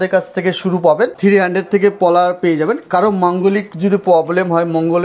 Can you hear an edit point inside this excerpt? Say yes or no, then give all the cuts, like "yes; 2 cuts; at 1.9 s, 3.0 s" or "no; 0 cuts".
yes; 1 cut; at 1.1 s